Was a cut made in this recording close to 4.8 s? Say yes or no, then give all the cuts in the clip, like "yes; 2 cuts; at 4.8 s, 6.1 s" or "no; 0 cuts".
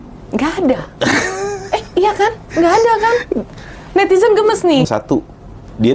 yes; 1 cut; at 4.8 s